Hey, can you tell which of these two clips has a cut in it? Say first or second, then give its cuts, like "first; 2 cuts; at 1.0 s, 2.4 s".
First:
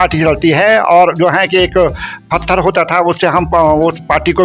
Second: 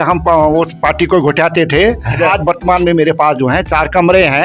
second; 1 cut; at 2.3 s